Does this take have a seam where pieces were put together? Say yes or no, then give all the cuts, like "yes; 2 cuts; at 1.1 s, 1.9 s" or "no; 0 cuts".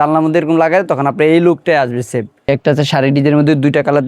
yes; 1 cut; at 2.4 s